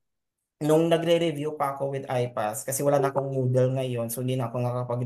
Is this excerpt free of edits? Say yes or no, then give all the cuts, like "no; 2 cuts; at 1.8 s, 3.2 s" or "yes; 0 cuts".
yes; 0 cuts